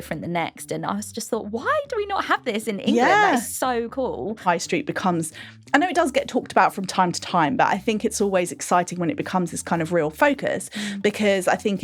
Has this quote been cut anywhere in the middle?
yes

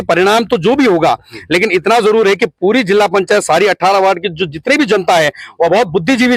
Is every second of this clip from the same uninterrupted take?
yes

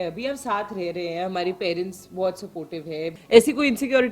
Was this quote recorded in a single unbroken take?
no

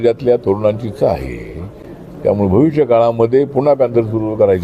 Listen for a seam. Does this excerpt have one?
no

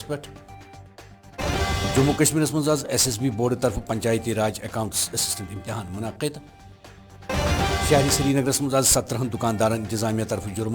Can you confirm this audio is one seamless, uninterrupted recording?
no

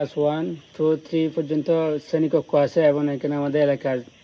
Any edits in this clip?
no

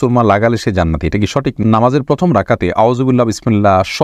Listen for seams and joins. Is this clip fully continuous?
no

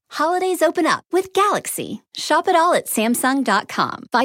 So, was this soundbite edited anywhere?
no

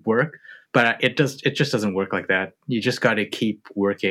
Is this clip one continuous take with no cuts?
yes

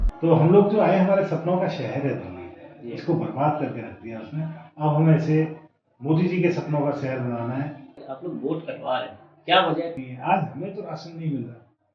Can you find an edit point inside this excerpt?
yes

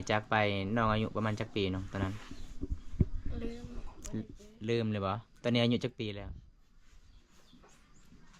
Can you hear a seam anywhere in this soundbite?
no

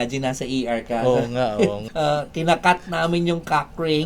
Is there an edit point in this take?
yes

